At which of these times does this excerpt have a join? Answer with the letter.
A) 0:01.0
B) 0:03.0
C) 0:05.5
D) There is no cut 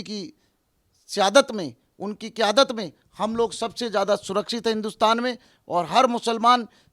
C